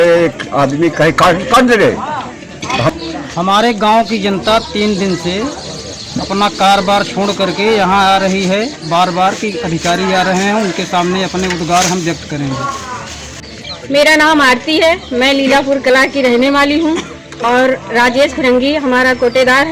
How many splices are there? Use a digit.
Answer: 2